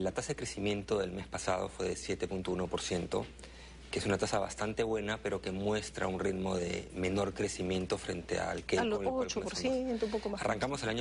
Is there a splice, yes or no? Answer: yes